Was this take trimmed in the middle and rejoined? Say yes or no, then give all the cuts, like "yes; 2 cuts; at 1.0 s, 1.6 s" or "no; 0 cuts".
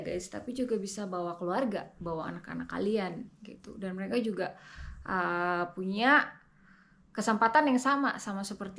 no; 0 cuts